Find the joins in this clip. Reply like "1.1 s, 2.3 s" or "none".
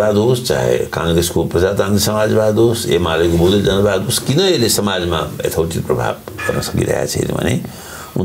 none